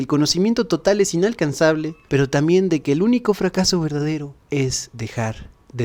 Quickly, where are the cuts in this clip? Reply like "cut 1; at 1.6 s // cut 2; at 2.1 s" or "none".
none